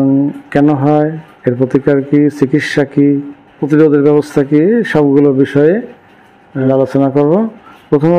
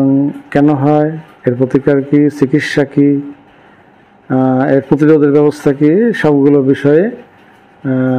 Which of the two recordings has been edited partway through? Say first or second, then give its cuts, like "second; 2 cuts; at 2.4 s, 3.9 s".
first; 2 cuts; at 3.6 s, 6.7 s